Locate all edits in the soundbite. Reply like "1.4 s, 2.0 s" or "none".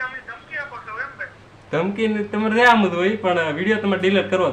none